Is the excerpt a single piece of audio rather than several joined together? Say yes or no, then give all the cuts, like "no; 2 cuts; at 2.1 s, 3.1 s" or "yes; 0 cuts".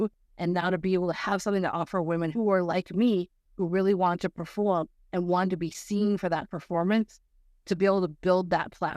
no; 1 cut; at 2.3 s